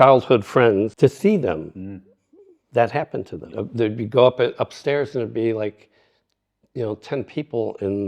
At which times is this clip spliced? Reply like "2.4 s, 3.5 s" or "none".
0.9 s, 3.5 s